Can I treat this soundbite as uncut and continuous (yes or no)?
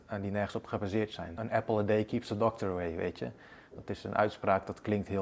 no